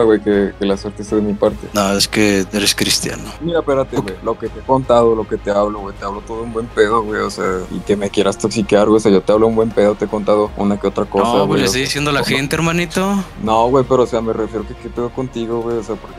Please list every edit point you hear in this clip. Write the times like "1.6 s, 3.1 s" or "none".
none

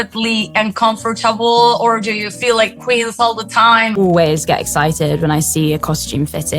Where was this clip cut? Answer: 3.9 s

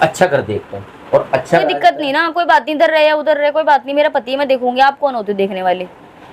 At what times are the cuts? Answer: 1.6 s

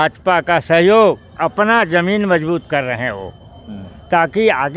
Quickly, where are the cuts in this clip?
none

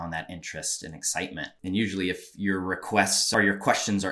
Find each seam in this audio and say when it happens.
1.5 s, 3.2 s

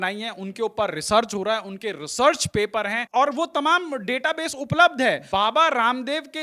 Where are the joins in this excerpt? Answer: 3.0 s, 5.2 s

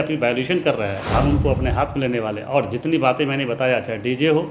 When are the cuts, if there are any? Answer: 1.0 s

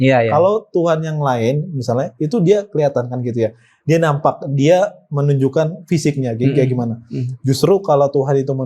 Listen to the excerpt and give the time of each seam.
none

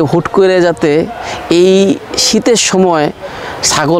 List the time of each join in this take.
none

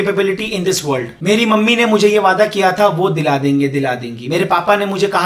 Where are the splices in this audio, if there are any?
1.1 s

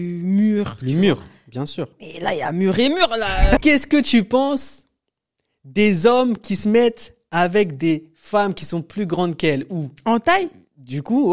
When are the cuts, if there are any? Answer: 3.6 s

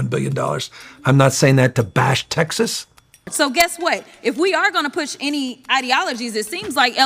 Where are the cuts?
3.3 s

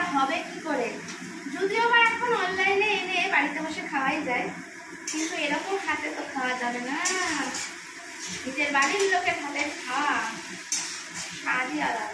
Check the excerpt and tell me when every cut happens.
none

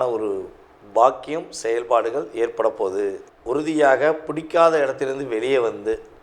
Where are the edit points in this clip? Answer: 3.3 s

